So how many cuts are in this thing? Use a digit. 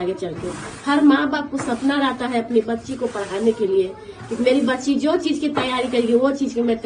0